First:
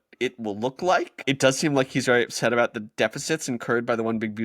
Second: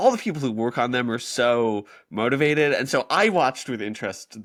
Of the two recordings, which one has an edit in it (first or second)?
first